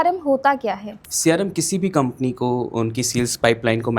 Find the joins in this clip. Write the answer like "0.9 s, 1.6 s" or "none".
1.1 s